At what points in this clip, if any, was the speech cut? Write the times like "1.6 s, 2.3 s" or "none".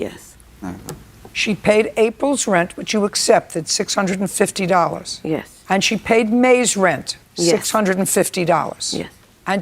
1.6 s